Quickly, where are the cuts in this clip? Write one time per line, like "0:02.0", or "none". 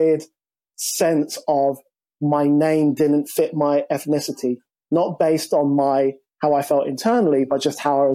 none

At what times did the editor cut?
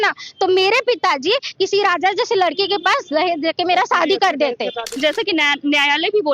0:04.9

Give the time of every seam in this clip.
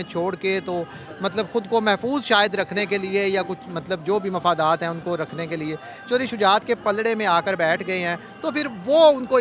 none

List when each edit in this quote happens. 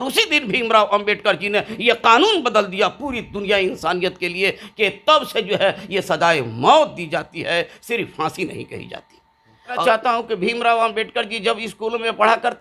0:09.8

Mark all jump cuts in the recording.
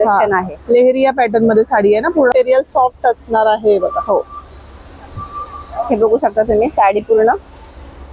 0:02.3

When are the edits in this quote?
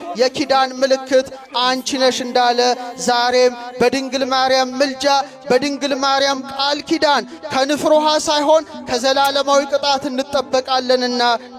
none

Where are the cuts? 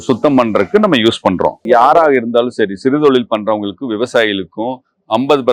0:01.6

